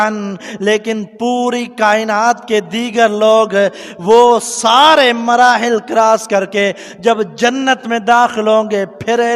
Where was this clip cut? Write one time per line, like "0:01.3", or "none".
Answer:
none